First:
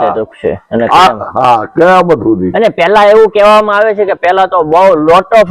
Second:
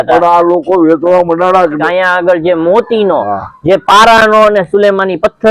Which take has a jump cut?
second; 1 cut; at 1.8 s

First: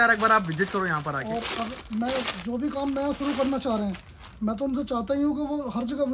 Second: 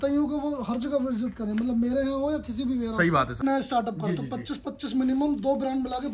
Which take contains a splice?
second; 1 cut; at 3.4 s

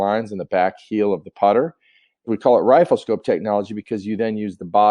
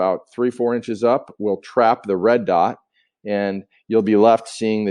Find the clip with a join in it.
first; 1 cut; at 2.3 s

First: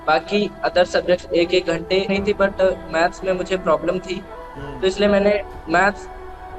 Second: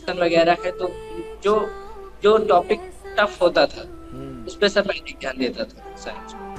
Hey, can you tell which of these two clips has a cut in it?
first; 1 cut; at 2.1 s

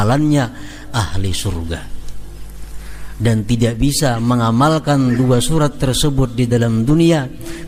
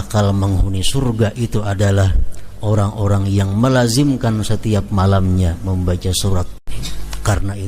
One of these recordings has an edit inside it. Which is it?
second; 1 cut; at 6.5 s

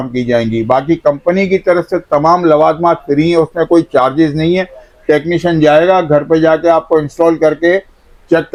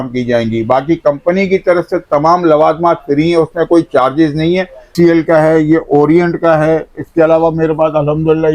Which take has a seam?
second; 1 cut; at 4.9 s

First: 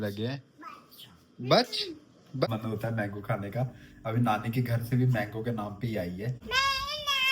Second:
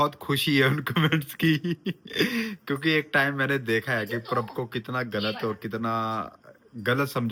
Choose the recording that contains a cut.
first; 2 cuts; at 2.4 s, 6.4 s

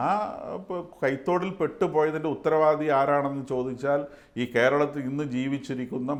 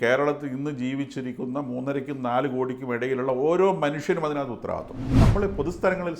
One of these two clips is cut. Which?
second; 1 cut; at 5.2 s

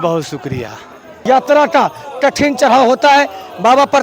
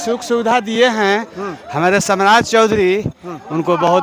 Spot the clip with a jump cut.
first; 1 cut; at 1.1 s

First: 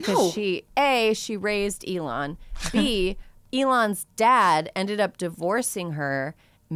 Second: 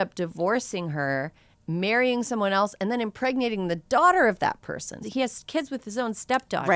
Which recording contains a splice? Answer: second; 1 cut; at 4.9 s

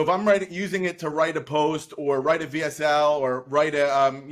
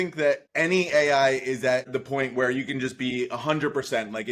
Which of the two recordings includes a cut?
second; 1 cut; at 1.9 s

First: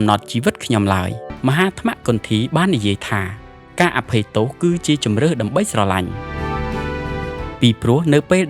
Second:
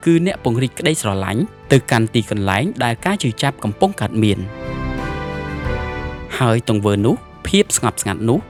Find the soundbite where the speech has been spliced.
first; 1 cut; at 1.3 s

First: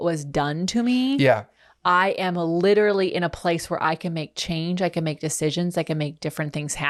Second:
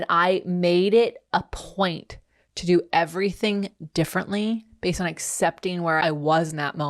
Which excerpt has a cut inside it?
second; 1 cut; at 6.0 s

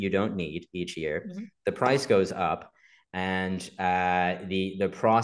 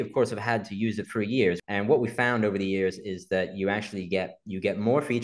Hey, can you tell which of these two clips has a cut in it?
second; 1 cut; at 1.6 s

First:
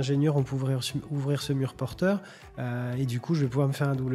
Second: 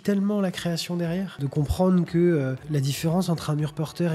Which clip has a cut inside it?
second; 2 cuts; at 1.4 s, 2.6 s

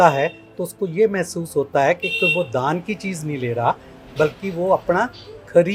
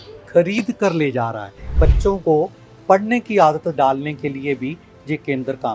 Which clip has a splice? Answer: second; 1 cut; at 1.8 s

